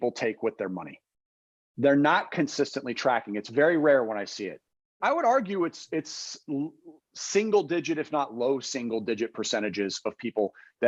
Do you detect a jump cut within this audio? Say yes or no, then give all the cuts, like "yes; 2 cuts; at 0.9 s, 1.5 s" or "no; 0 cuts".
yes; 1 cut; at 5.0 s